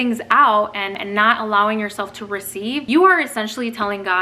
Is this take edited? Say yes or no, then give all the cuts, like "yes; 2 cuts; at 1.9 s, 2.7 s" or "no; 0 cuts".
yes; 1 cut; at 0.9 s